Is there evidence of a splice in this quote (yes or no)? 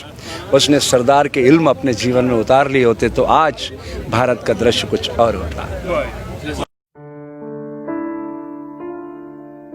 yes